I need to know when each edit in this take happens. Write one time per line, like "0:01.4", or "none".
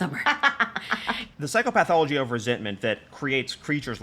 0:01.2